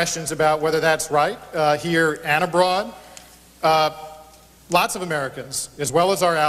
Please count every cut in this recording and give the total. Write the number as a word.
zero